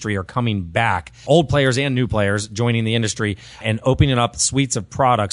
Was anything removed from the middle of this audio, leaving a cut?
yes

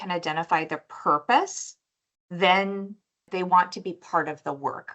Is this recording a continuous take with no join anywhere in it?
yes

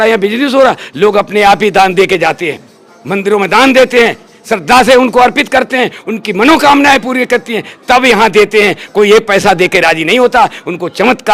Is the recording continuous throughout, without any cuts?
yes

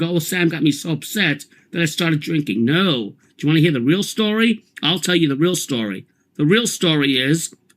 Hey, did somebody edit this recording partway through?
yes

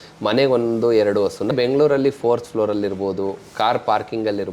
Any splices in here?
yes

